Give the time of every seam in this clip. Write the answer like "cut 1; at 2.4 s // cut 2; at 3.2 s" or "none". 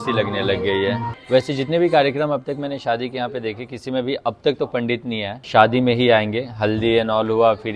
none